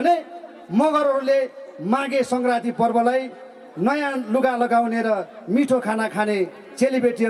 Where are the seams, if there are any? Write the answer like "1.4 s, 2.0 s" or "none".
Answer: none